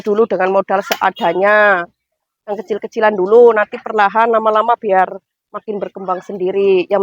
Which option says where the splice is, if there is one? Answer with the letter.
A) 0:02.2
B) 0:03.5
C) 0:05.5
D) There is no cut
D